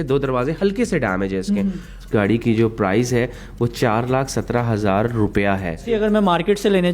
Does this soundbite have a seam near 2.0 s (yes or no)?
yes